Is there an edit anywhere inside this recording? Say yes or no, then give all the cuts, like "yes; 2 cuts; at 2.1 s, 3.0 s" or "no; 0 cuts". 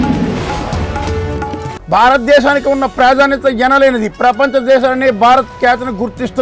no; 0 cuts